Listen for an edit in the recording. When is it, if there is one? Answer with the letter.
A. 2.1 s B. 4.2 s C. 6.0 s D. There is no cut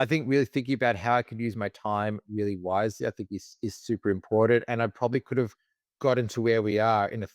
D